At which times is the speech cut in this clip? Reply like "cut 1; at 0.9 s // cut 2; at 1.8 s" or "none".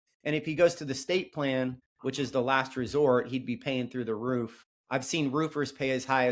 none